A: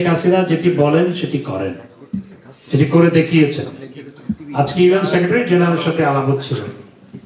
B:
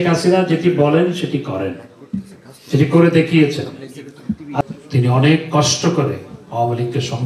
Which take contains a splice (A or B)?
B